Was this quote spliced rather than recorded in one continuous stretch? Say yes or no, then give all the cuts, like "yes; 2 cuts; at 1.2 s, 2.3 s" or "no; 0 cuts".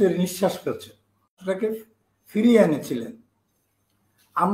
yes; 1 cut; at 1.4 s